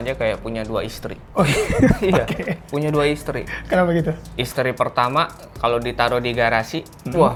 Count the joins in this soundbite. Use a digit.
0